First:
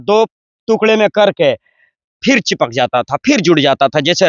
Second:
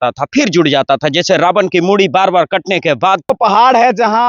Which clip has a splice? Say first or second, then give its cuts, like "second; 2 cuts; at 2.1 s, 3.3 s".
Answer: second; 1 cut; at 3.3 s